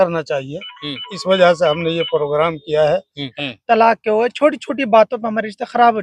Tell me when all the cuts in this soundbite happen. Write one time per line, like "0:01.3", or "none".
0:03.2